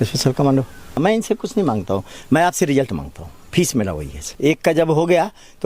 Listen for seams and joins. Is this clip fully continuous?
no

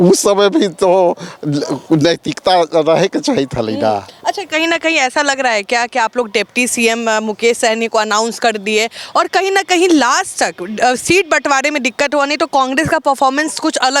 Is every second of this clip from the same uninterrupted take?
yes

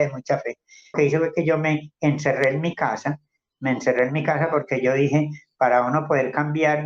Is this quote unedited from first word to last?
no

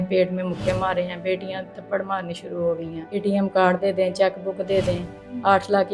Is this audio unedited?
no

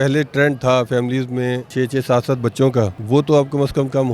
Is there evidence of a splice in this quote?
yes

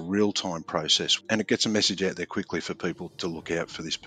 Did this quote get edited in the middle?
yes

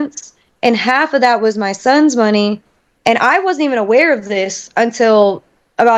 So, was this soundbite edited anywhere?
no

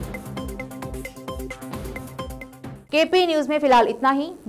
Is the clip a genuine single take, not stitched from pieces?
yes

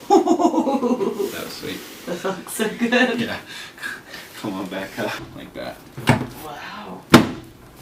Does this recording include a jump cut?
yes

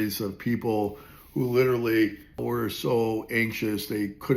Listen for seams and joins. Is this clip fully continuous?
yes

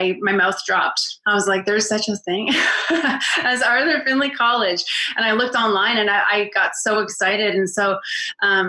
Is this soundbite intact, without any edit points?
yes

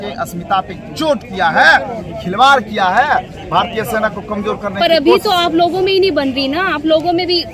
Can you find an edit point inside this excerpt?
no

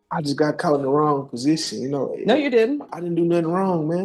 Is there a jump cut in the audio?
no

